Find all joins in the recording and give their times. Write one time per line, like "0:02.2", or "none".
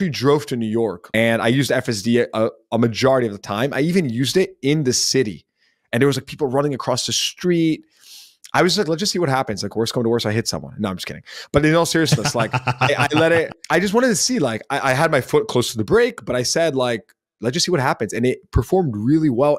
0:01.0
0:13.6

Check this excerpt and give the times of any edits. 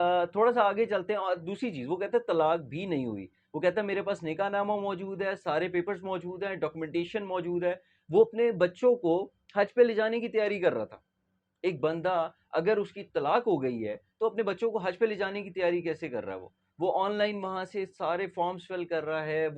none

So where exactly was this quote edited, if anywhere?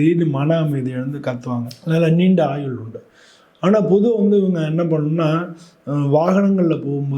0:01.7

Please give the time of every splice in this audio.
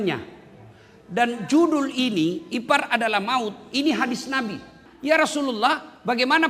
0:04.9

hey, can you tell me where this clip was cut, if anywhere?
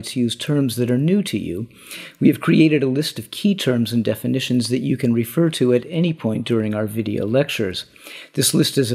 0:01.3

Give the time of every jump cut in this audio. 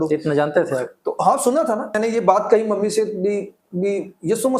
0:02.0

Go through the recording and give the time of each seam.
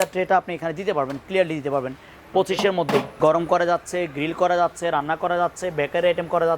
0:03.2

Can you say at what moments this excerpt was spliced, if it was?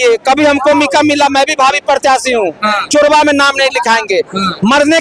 none

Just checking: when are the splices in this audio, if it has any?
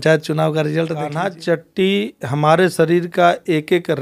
0:01.1

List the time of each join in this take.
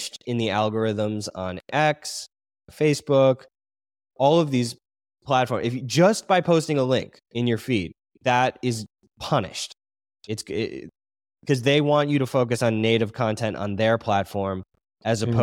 none

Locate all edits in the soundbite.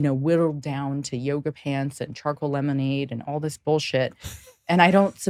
none

